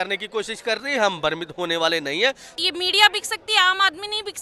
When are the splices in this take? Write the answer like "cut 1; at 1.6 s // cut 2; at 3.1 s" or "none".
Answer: cut 1; at 2.5 s